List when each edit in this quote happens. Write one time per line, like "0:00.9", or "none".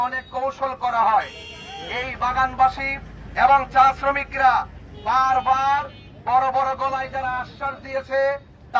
none